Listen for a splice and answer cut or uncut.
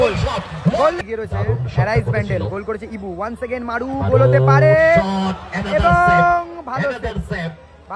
cut